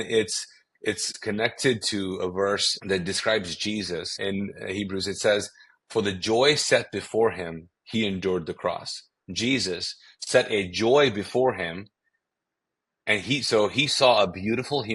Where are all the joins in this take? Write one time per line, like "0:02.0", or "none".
0:01.1
0:02.7
0:04.2